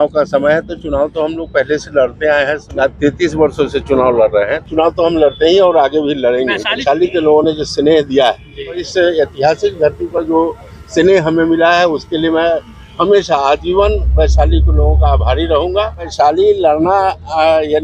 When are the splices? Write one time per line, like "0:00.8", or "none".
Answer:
0:02.7
0:04.6
0:06.8
0:08.8
0:16.1